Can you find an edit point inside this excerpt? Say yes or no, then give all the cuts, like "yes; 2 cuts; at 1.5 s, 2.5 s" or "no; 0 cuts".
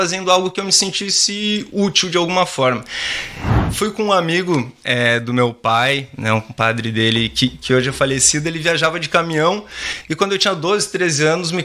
yes; 1 cut; at 3.6 s